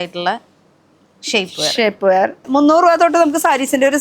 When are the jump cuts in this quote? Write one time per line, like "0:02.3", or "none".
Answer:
0:02.4